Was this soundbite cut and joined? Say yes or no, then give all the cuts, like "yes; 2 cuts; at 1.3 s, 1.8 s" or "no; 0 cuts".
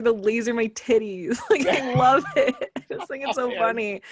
no; 0 cuts